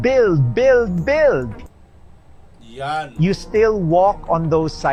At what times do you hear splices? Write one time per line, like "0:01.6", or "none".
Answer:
none

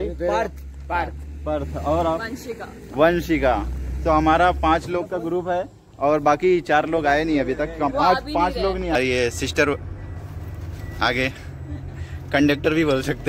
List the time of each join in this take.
0:09.0

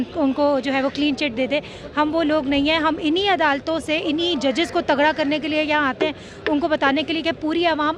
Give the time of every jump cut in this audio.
none

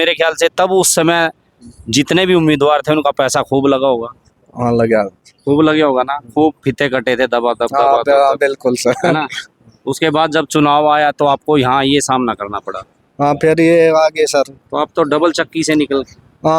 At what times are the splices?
none

